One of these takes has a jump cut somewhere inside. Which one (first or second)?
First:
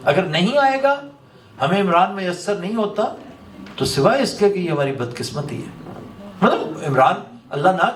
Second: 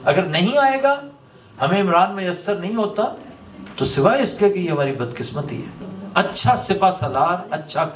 second